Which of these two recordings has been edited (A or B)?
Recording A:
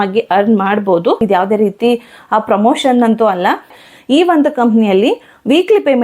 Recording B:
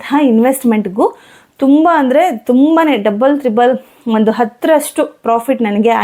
A